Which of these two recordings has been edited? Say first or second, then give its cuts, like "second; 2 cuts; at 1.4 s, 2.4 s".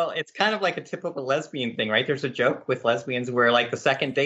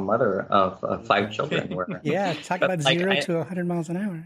second; 1 cut; at 1.8 s